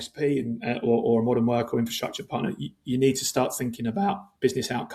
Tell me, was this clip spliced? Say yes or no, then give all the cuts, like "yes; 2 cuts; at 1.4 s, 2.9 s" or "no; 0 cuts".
no; 0 cuts